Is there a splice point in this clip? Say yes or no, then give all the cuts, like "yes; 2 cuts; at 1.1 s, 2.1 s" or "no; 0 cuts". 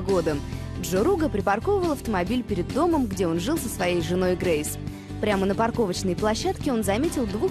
yes; 1 cut; at 4.6 s